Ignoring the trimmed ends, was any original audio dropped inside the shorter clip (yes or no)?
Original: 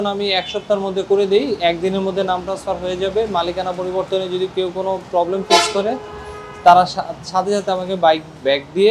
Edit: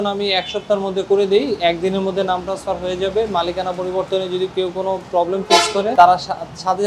yes